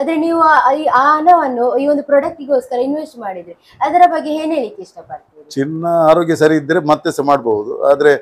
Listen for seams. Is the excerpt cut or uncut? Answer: uncut